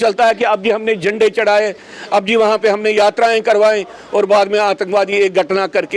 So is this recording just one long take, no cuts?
yes; 0 cuts

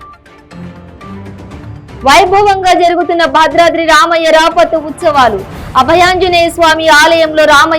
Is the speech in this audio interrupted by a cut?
yes; 1 cut; at 2.0 s

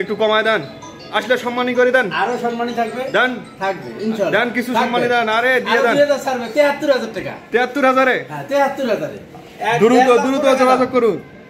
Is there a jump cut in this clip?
no; 0 cuts

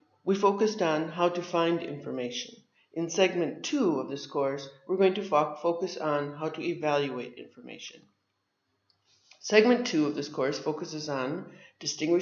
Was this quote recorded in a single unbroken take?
no; 1 cut; at 9.6 s

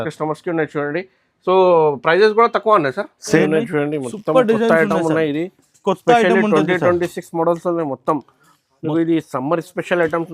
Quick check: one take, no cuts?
no; 1 cut; at 3.4 s

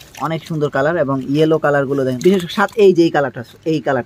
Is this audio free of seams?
no; 1 cut; at 2.2 s

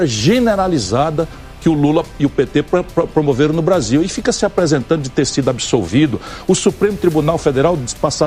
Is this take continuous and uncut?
yes; 0 cuts

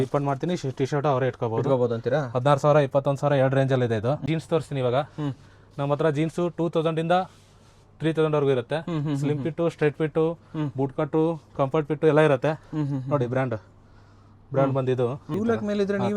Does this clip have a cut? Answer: yes; 2 cuts; at 4.2 s, 15.2 s

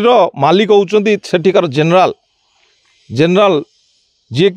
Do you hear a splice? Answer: no; 0 cuts

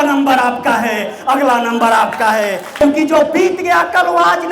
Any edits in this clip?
yes; 1 cut; at 2.8 s

